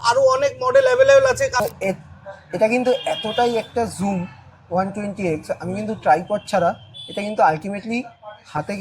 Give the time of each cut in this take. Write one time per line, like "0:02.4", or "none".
0:01.5